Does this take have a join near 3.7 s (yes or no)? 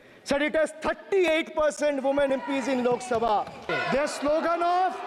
yes